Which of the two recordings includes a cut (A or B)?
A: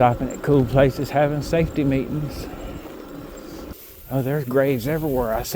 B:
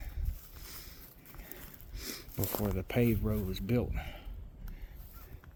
A